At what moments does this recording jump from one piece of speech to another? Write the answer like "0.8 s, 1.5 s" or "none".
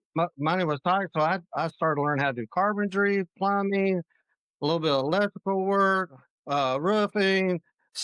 none